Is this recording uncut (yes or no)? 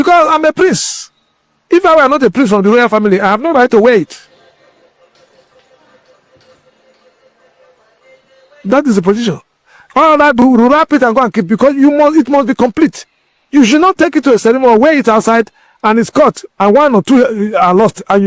no